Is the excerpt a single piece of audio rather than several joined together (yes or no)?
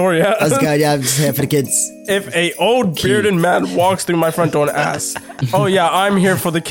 no